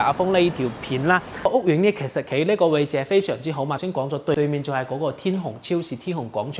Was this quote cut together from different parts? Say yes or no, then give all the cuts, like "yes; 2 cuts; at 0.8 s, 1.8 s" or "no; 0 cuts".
yes; 2 cuts; at 1.5 s, 4.2 s